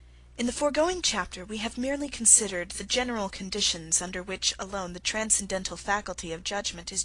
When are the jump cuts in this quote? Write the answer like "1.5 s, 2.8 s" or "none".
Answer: 2.0 s